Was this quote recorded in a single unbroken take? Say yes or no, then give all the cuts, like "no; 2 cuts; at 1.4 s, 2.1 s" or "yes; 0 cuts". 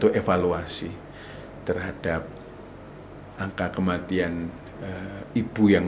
yes; 0 cuts